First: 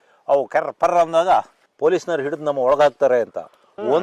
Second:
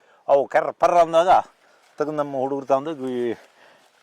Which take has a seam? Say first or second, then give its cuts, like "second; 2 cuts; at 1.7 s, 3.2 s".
first; 1 cut; at 1.6 s